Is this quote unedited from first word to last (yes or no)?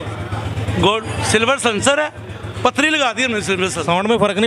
yes